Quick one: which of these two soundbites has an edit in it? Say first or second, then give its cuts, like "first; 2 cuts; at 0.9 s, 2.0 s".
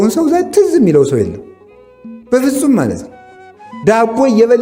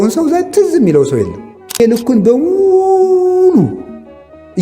second; 1 cut; at 1.8 s